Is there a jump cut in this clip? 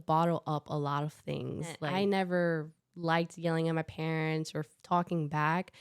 yes; 1 cut; at 1.8 s

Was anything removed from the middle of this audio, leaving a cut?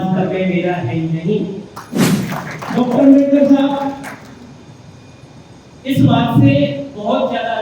yes; 1 cut; at 2.1 s

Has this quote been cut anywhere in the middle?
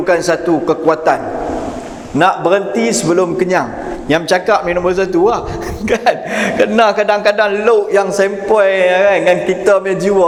no; 0 cuts

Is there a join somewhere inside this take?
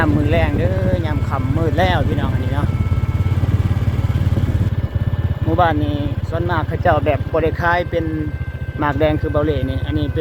no; 0 cuts

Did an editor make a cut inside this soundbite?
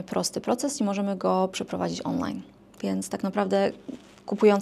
no; 0 cuts

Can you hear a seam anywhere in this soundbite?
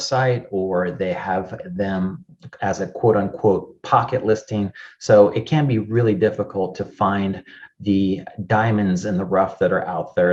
no; 0 cuts

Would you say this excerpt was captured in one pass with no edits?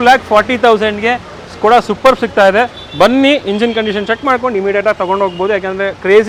yes; 0 cuts

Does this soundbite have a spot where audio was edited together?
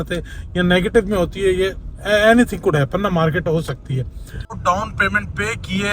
yes; 1 cut; at 4.6 s

